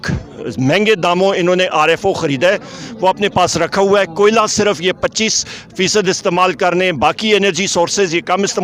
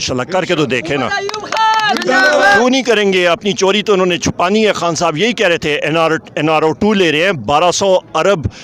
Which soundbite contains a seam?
second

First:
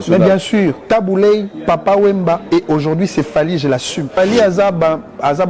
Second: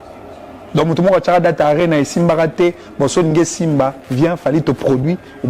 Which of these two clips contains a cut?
first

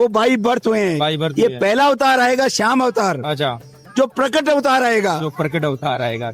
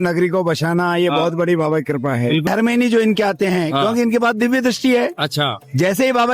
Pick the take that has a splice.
second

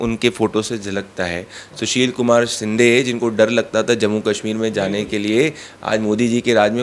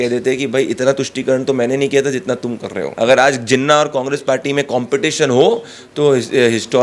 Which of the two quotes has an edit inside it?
second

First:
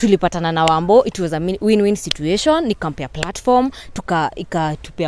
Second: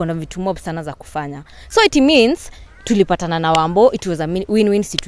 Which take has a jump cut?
second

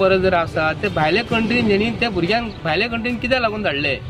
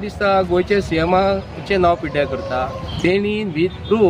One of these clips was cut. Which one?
second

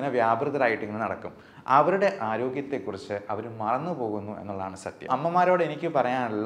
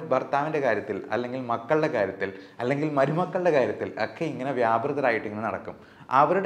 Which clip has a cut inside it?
first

